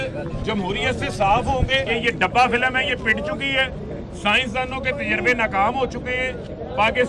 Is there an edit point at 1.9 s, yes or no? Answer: yes